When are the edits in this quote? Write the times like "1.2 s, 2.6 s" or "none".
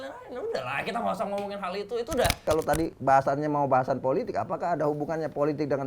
2.4 s